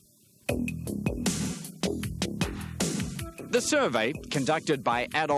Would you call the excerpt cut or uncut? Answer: cut